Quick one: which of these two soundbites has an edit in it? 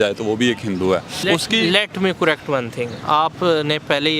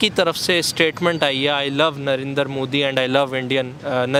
first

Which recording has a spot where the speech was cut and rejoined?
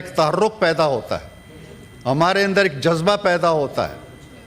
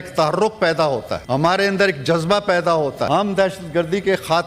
second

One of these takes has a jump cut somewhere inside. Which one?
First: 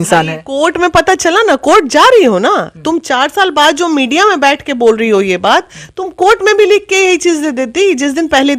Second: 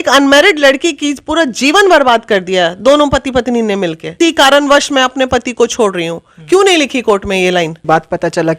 second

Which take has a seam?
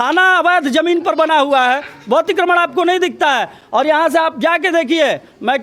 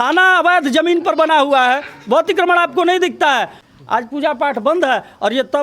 second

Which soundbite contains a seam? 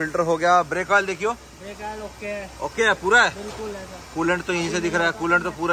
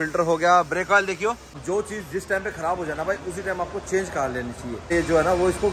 second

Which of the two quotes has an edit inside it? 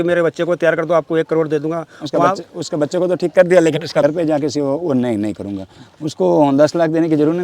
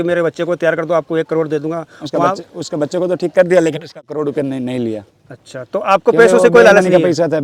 first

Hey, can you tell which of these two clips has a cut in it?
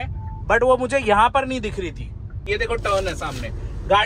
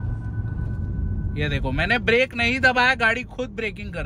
first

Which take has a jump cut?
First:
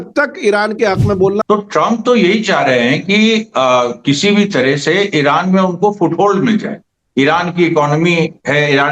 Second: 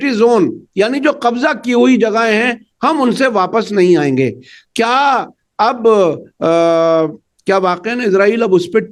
first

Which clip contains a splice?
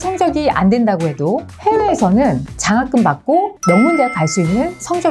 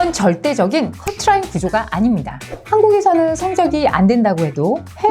second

